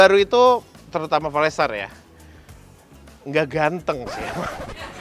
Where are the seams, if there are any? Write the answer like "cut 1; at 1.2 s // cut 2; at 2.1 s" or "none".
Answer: none